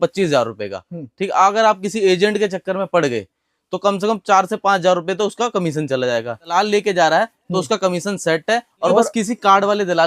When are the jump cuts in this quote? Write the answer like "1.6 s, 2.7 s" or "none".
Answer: 6.5 s, 8.9 s

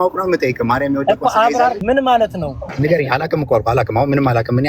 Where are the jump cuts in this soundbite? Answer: 1.8 s, 2.7 s

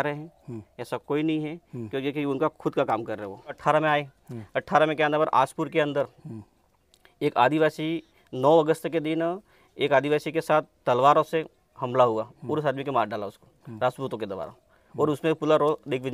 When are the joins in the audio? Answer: 3.6 s

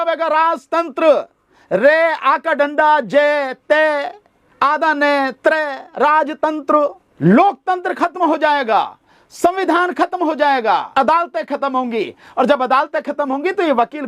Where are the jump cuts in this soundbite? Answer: 7.0 s, 10.9 s

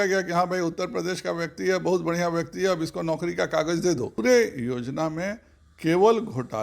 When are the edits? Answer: 4.2 s

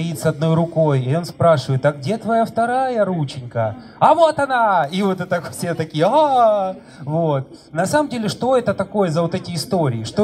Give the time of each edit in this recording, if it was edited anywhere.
none

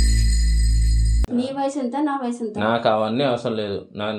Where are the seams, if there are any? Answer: 1.2 s

